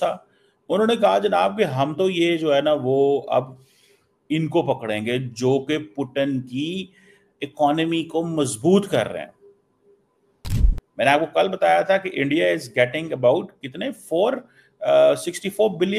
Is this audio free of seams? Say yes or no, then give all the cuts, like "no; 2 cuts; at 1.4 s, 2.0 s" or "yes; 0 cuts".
yes; 0 cuts